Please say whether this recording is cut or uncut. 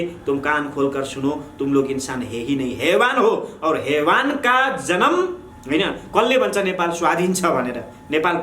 cut